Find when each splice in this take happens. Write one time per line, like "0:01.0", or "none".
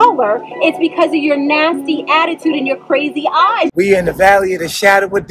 0:03.7